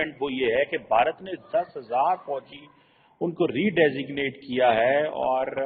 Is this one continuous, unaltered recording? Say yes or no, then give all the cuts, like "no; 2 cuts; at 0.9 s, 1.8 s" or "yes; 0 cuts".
yes; 0 cuts